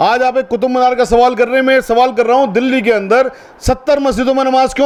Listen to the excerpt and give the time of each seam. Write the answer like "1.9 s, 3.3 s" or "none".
none

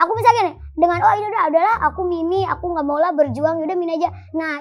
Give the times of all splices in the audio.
none

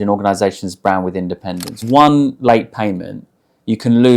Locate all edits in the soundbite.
1.7 s

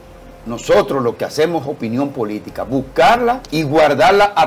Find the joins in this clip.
3.4 s

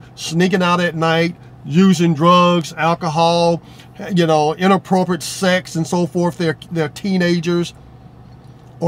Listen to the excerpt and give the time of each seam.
none

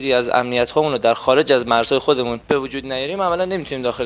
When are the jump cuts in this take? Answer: 2.4 s

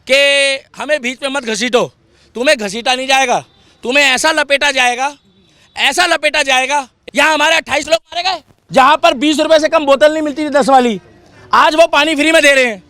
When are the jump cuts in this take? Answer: 7.0 s, 8.5 s

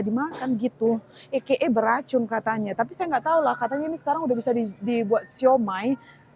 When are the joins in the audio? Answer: none

